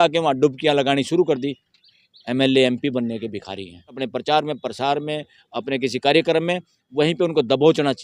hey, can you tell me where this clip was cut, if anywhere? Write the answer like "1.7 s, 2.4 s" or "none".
1.7 s, 4.0 s